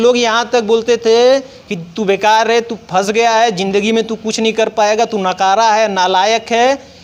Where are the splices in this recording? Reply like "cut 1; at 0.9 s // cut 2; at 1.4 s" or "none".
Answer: none